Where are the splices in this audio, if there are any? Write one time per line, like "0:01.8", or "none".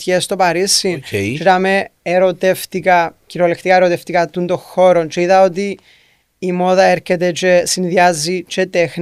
none